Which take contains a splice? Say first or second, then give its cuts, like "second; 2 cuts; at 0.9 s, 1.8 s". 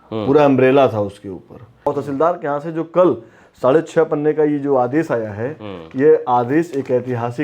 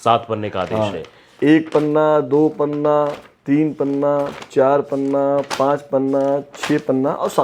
first; 1 cut; at 1.9 s